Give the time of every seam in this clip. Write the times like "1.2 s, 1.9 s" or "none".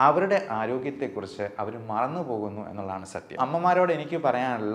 3.4 s